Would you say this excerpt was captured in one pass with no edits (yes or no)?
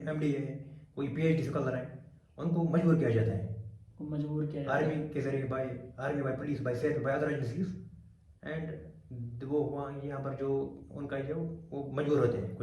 yes